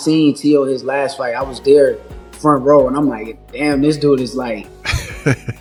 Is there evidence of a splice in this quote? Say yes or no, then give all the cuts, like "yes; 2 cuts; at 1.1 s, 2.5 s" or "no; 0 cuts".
no; 0 cuts